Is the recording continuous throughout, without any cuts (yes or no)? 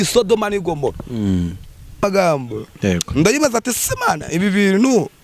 no